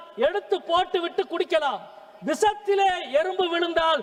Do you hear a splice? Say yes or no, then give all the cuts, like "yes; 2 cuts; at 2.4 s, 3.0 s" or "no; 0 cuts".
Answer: no; 0 cuts